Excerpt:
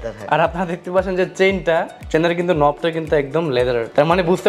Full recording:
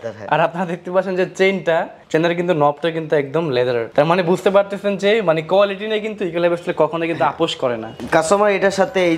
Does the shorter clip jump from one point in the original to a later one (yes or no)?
no